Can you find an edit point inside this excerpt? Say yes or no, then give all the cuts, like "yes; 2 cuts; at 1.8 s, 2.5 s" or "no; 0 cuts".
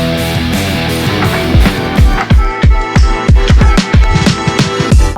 yes; 1 cut; at 1.4 s